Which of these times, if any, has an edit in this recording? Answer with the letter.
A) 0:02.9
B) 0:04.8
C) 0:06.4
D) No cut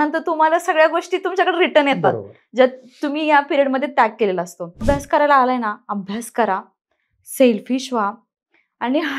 B